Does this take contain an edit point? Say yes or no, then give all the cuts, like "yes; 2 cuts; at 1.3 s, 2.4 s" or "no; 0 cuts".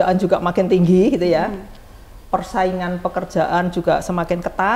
no; 0 cuts